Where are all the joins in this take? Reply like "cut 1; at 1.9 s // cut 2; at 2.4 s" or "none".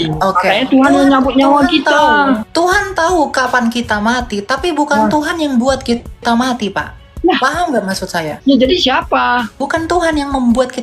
cut 1; at 2.5 s // cut 2; at 8.3 s // cut 3; at 9.6 s